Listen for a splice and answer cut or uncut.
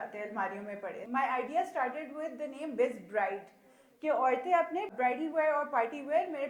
cut